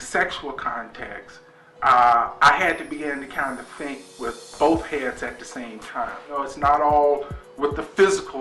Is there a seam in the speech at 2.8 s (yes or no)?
no